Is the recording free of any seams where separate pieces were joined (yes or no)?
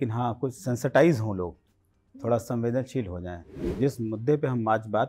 no